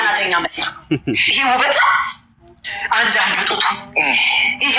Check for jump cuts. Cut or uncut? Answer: uncut